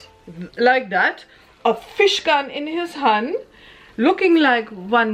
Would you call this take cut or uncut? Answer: uncut